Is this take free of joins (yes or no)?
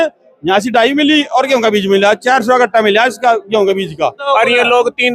no